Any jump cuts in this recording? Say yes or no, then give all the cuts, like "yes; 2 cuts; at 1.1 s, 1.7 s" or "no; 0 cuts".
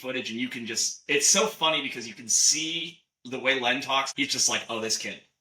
yes; 1 cut; at 4.1 s